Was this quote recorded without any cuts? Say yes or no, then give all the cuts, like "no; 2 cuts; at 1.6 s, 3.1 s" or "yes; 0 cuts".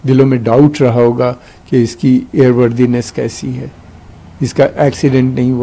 yes; 0 cuts